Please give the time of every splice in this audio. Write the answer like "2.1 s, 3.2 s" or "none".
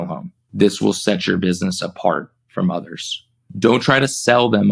none